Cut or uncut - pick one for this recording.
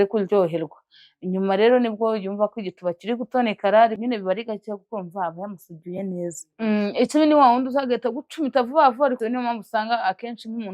uncut